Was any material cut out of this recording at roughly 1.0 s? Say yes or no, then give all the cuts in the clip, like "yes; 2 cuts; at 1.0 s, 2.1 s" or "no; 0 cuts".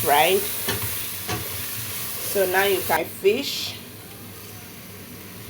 no; 1 cut; at 3.0 s